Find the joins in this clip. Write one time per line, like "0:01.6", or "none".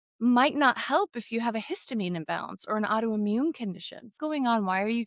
0:04.1